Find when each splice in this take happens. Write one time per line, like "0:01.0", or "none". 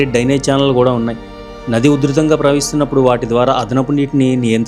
none